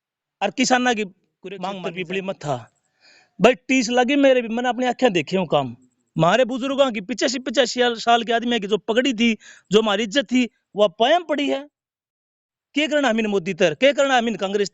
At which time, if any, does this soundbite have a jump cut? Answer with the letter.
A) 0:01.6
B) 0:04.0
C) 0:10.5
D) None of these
A